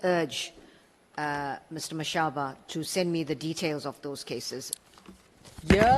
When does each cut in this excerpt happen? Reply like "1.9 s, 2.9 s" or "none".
4.7 s